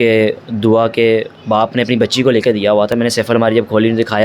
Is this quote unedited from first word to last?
yes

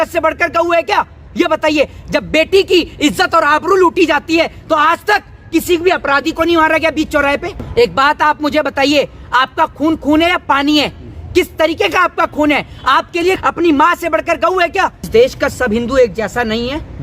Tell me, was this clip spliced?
yes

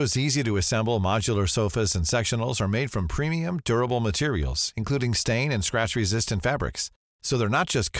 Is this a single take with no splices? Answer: yes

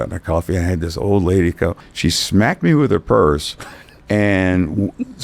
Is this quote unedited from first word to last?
no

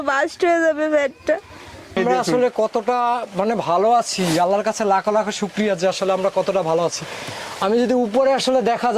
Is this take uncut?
no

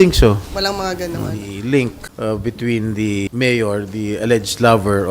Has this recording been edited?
yes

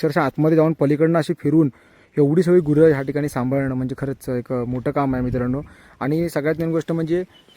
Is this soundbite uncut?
yes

